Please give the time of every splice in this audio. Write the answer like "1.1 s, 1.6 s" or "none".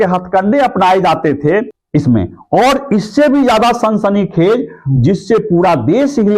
1.8 s